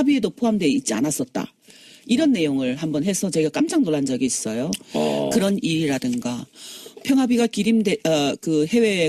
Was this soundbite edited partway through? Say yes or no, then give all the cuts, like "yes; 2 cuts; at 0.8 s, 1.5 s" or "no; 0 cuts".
yes; 1 cut; at 3.2 s